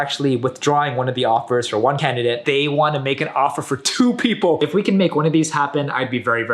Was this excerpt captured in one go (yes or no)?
no